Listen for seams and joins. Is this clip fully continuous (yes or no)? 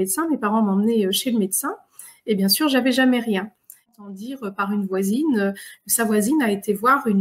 no